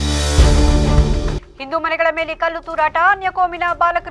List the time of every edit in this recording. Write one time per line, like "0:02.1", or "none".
none